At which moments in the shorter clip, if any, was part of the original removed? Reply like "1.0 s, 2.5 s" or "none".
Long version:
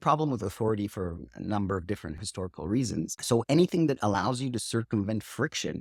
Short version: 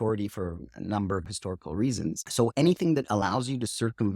1.2 s